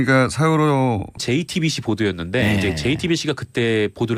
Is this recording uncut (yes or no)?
yes